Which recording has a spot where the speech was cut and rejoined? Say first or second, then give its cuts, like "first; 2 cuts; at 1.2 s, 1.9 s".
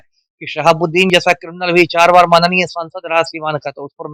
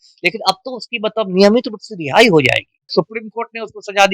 second; 1 cut; at 2.9 s